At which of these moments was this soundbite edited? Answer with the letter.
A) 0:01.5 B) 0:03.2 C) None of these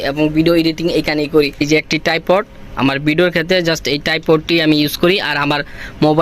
A